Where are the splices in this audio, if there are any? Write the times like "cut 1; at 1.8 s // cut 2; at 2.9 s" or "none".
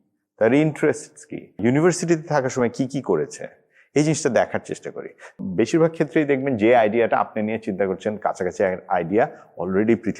cut 1; at 1.5 s // cut 2; at 5.3 s